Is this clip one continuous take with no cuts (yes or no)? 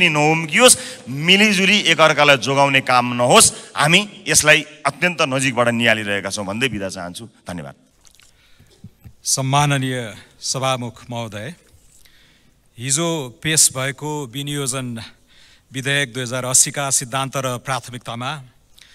yes